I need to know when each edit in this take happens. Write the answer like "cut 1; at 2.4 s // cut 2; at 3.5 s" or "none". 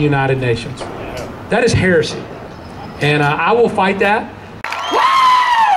cut 1; at 4.5 s